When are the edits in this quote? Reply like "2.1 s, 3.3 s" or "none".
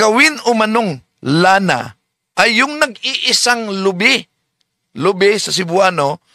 none